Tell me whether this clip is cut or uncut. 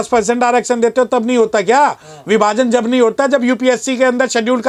uncut